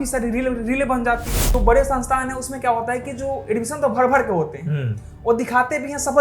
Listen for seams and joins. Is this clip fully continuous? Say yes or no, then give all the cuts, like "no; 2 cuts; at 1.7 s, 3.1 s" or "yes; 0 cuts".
no; 1 cut; at 1.5 s